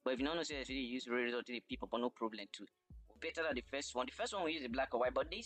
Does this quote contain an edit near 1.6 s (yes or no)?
no